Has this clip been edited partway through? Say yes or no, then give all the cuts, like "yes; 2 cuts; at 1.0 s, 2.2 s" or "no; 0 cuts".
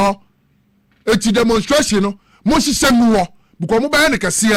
no; 0 cuts